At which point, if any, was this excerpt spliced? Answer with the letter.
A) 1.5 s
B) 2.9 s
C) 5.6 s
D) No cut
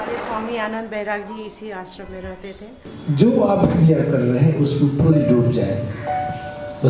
B